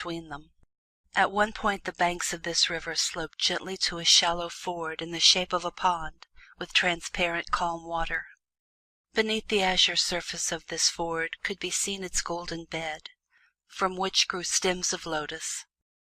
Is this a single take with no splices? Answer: no; 1 cut; at 9.5 s

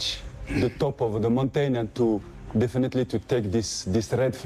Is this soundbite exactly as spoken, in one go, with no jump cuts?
yes; 0 cuts

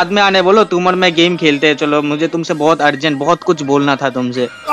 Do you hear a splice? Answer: no; 0 cuts

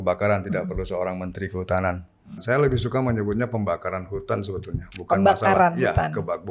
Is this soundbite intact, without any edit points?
no; 1 cut; at 2.4 s

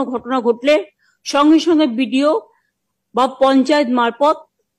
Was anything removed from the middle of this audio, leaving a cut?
no; 0 cuts

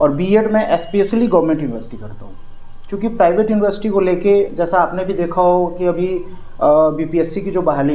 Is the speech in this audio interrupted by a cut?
no; 0 cuts

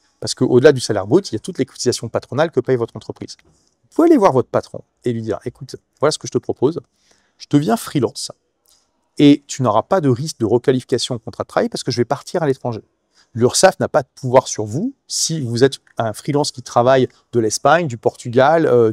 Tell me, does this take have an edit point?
no; 0 cuts

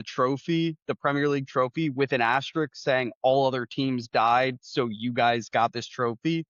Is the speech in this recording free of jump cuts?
yes; 0 cuts

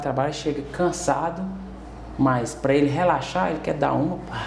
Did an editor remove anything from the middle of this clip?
no; 0 cuts

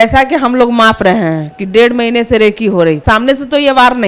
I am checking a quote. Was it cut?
yes; 1 cut; at 3.0 s

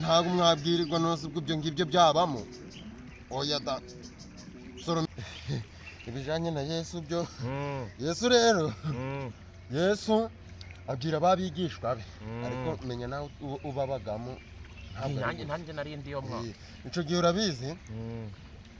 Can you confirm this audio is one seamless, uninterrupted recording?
no; 1 cut; at 5.1 s

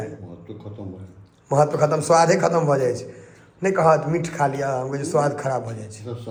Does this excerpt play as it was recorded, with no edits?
yes; 0 cuts

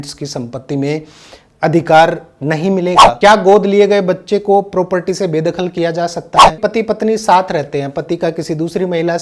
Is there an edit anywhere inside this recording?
yes; 2 cuts; at 3.2 s, 6.5 s

